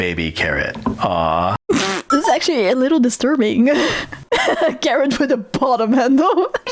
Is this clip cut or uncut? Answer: cut